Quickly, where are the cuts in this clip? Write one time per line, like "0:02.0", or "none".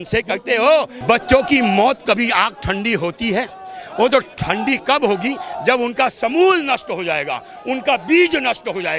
0:01.0